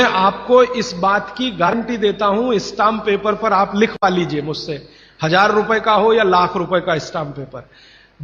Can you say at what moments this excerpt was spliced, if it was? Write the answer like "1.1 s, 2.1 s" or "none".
1.7 s